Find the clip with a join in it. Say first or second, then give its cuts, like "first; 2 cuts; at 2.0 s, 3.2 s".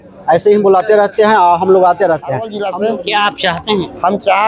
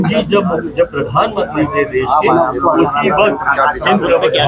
first; 1 cut; at 2.5 s